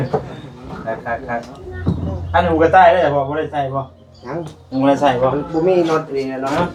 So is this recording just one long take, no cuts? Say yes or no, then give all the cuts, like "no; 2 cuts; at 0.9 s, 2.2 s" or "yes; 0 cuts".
yes; 0 cuts